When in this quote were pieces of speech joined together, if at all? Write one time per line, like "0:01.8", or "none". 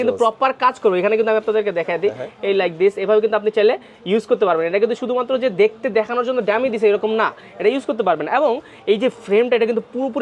none